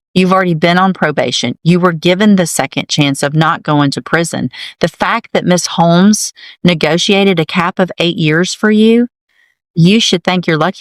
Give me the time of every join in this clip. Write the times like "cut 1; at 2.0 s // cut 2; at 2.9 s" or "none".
none

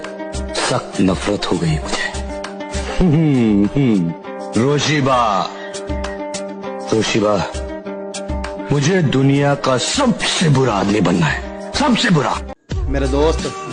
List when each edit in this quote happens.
cut 1; at 12.5 s

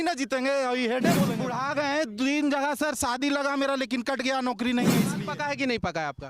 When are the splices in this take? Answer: cut 1; at 1.4 s // cut 2; at 5.1 s

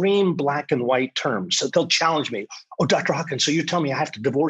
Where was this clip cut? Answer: cut 1; at 1.7 s

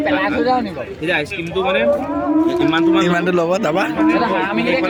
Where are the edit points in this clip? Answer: none

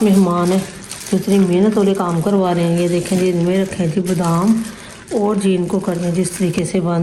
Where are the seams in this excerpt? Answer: none

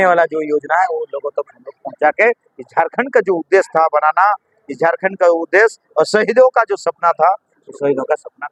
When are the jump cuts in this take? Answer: none

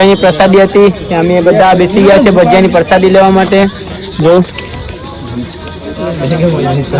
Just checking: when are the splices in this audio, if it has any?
none

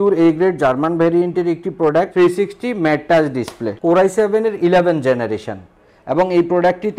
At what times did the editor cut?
cut 1; at 2.1 s // cut 2; at 3.6 s

